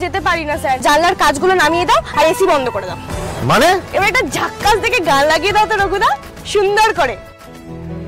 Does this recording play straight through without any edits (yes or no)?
no